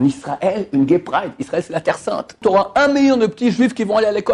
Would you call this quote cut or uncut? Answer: cut